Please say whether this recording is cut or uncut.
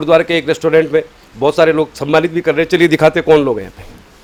uncut